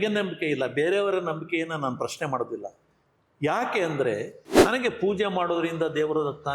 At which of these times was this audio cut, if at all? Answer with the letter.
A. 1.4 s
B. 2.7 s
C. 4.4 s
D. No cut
C